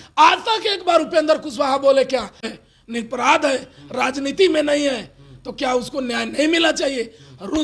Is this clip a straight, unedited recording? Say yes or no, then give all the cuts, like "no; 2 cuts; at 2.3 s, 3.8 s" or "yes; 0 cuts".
yes; 0 cuts